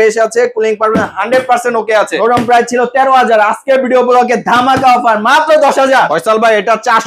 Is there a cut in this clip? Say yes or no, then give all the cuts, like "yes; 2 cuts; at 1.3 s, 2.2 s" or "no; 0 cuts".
yes; 2 cuts; at 2.2 s, 5.9 s